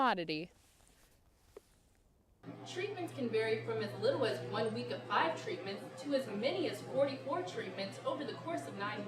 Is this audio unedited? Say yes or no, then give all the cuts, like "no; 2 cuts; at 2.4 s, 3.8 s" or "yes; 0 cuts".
no; 1 cut; at 2.2 s